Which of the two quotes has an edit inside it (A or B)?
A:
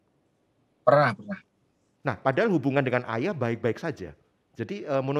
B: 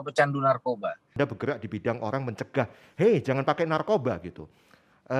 B